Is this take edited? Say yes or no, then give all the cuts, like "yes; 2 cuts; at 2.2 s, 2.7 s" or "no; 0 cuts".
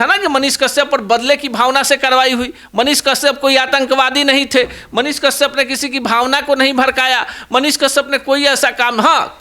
no; 0 cuts